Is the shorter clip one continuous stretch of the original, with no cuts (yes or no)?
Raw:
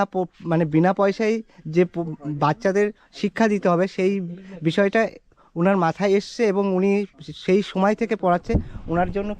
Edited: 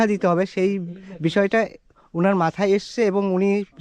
yes